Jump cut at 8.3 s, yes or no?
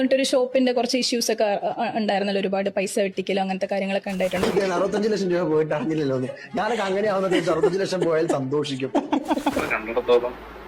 no